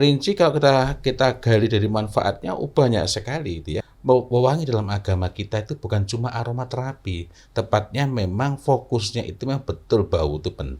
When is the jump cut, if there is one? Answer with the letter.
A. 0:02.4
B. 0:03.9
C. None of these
B